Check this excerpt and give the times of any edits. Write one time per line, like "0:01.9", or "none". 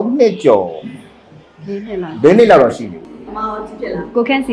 none